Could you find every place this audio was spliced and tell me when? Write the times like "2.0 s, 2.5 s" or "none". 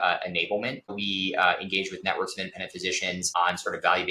0.9 s